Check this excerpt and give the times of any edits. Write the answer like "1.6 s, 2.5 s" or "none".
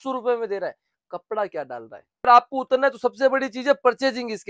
2.3 s